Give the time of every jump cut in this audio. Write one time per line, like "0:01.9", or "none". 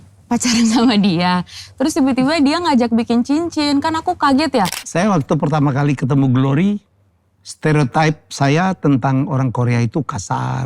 0:04.8